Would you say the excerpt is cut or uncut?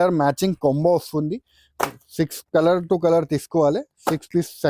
uncut